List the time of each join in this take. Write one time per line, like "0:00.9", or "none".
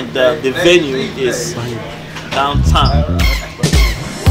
0:02.8